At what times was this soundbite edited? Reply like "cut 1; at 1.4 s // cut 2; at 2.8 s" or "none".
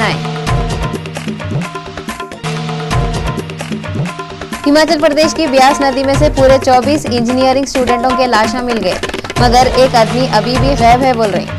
none